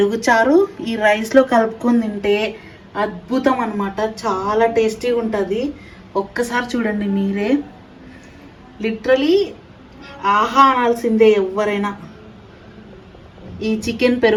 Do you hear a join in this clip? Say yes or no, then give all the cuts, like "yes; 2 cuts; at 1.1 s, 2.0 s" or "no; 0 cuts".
no; 0 cuts